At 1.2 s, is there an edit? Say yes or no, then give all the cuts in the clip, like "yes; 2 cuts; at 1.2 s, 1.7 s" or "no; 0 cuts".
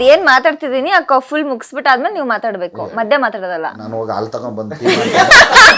no; 1 cut; at 3.8 s